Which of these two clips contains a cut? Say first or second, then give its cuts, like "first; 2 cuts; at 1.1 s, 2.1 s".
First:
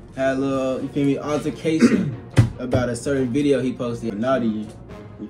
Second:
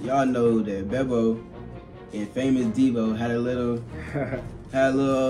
first; 1 cut; at 4.1 s